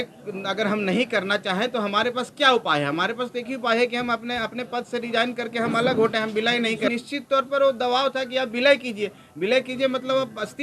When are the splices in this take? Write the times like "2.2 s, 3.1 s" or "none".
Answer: 6.9 s